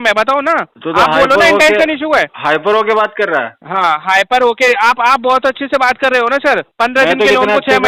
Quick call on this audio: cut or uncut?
uncut